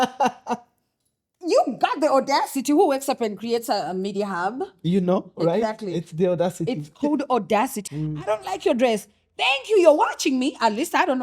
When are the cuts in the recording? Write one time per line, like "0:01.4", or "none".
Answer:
0:07.8